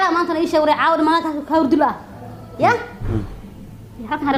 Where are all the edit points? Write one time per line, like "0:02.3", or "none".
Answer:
none